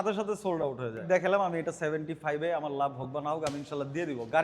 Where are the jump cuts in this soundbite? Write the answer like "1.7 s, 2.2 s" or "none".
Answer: 1.1 s